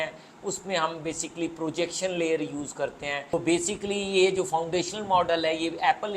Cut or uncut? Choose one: cut